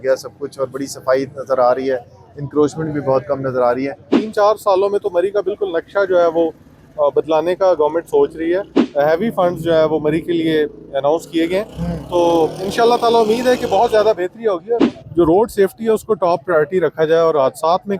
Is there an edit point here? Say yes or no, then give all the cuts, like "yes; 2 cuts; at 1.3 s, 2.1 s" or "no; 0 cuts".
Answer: yes; 3 cuts; at 4.2 s, 8.8 s, 14.8 s